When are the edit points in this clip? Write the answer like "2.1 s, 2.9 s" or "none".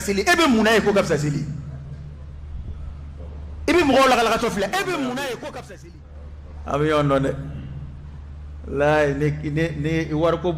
5.7 s